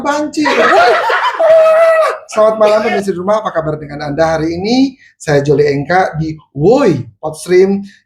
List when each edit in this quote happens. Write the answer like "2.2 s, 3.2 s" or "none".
2.6 s